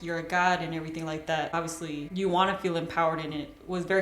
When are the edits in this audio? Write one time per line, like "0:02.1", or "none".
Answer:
0:01.5